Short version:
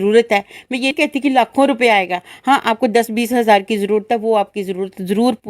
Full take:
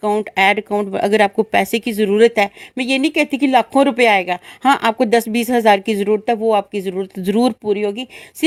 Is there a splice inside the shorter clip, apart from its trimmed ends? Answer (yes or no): yes